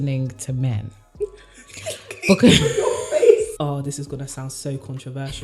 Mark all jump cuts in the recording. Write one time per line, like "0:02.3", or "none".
0:03.6